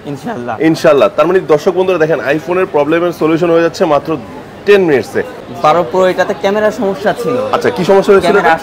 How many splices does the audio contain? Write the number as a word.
one